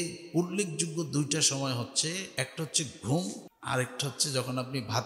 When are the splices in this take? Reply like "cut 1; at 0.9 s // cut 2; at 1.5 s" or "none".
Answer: cut 1; at 2.3 s // cut 2; at 3.5 s